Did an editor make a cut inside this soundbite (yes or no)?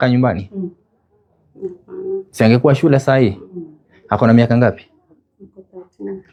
no